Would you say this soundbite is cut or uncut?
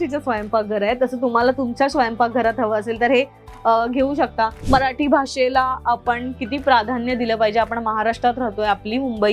cut